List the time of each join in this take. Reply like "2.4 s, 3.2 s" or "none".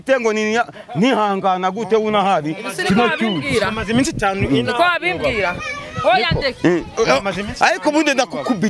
none